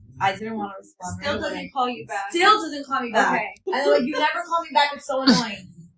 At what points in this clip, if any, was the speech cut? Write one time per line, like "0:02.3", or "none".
0:03.5